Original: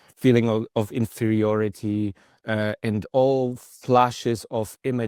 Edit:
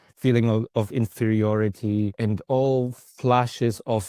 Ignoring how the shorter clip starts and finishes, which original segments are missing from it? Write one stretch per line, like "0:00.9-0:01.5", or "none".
0:02.2-0:02.8